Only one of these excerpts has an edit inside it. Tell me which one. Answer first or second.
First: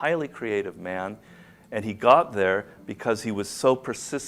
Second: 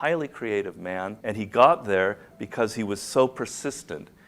second